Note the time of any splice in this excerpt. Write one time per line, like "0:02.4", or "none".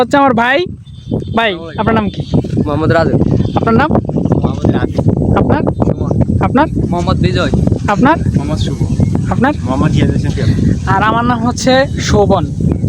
none